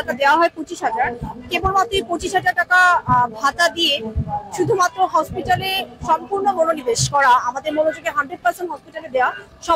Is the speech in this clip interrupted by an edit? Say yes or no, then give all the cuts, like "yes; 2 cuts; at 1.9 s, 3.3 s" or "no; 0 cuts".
no; 0 cuts